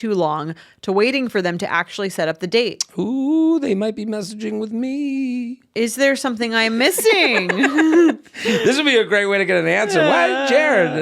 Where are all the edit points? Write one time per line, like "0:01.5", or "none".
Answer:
0:08.3

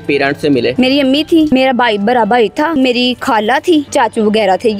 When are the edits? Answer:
0:00.7
0:01.5
0:02.8
0:03.9

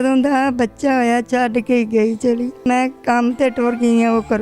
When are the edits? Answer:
0:02.7

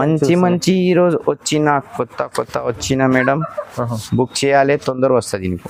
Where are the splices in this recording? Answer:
none

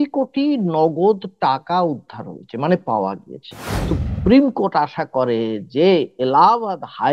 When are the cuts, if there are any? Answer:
0:03.9

